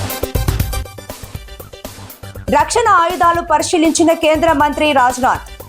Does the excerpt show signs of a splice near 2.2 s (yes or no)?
yes